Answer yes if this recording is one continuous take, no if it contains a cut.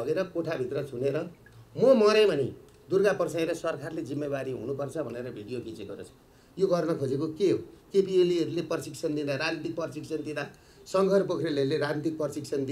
yes